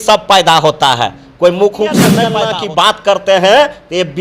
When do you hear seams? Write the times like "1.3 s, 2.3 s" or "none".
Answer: 2.3 s